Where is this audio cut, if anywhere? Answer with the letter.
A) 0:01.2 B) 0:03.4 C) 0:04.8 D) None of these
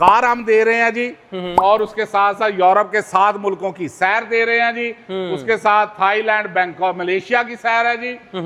D